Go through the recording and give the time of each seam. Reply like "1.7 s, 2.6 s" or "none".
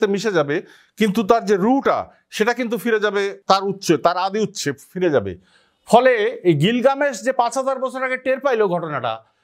3.4 s

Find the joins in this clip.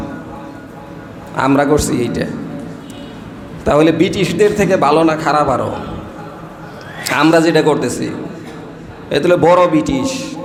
none

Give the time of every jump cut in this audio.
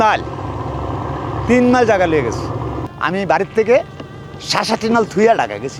2.9 s

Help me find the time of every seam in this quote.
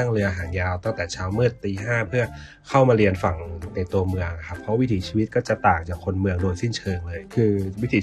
4.6 s, 7.2 s

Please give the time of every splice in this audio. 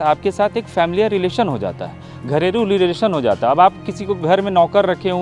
none

